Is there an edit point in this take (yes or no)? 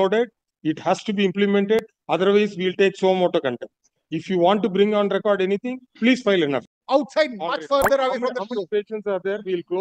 yes